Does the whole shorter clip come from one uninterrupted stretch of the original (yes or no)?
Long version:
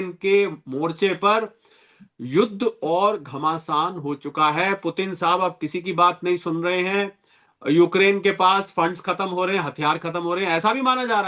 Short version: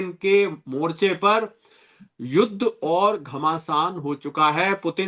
yes